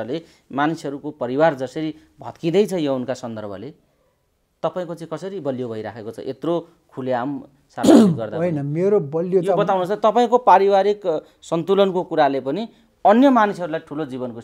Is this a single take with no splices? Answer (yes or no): yes